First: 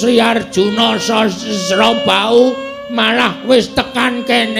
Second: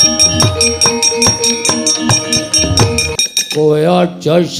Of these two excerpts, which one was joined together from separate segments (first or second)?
second